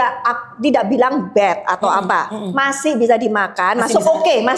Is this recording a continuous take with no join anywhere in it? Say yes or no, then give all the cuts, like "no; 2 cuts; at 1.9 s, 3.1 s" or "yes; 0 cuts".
yes; 0 cuts